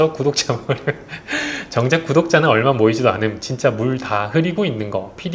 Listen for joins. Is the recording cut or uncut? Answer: uncut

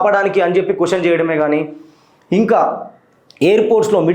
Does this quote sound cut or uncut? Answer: uncut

